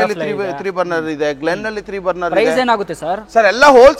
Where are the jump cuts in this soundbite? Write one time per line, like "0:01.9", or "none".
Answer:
none